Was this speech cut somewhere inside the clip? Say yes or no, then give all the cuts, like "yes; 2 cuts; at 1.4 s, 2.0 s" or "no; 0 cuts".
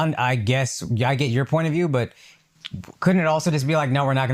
no; 0 cuts